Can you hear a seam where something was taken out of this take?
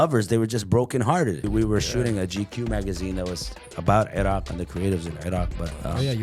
yes; 1 cut; at 1.5 s

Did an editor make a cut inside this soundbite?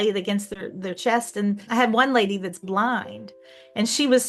yes; 1 cut; at 1.6 s

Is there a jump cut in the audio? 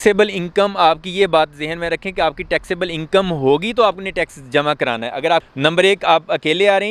yes; 1 cut; at 5.5 s

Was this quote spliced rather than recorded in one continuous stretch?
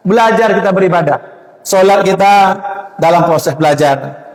no; 0 cuts

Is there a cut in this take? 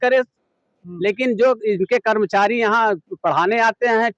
no; 0 cuts

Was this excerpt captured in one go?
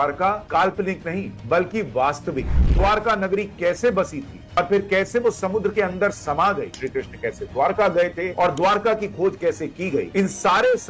no; 3 cuts; at 6.8 s, 8.3 s, 10.1 s

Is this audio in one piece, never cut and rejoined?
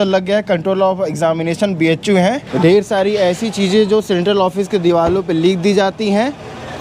no; 1 cut; at 2.5 s

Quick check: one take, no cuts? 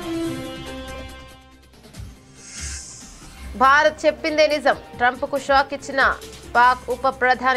no; 2 cuts; at 1.0 s, 3.5 s

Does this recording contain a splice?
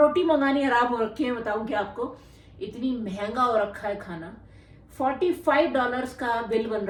no; 0 cuts

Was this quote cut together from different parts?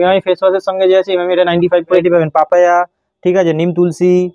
yes; 1 cut; at 2.0 s

